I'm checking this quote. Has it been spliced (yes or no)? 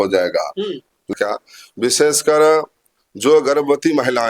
yes